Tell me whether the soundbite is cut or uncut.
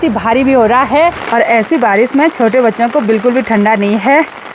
cut